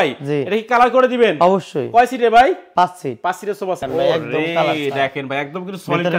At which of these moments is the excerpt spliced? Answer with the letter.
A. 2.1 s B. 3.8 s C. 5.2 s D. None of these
B